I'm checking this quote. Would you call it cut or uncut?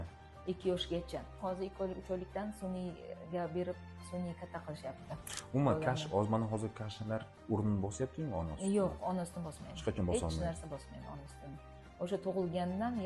cut